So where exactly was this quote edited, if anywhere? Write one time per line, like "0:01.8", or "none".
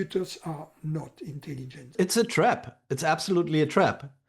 0:01.9